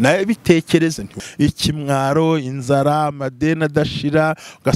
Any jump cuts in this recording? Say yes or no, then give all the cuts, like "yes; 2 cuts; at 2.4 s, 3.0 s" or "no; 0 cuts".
yes; 1 cut; at 1.2 s